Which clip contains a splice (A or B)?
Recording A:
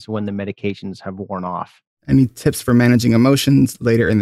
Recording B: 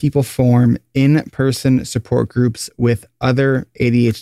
A